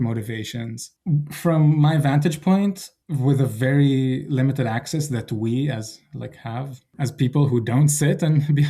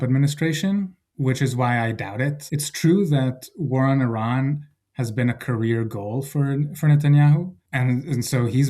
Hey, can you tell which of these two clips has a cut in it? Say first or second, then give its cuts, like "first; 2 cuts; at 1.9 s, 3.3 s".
second; 1 cut; at 2.4 s